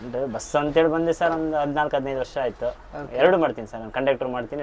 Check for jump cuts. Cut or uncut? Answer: uncut